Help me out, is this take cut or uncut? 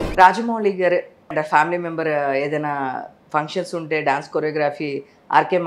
cut